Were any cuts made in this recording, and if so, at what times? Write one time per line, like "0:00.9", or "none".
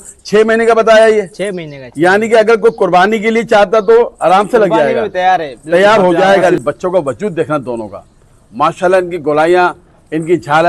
0:06.5